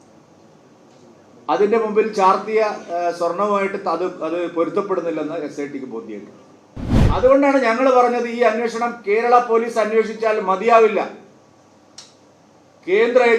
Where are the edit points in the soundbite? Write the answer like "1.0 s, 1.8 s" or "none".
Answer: 7.0 s

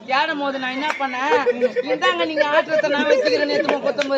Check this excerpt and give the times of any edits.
none

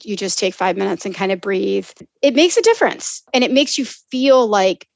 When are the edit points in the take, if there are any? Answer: 2.1 s, 3.3 s

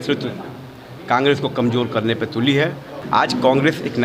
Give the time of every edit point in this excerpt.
3.0 s

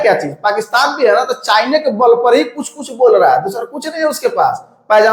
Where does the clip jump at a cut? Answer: none

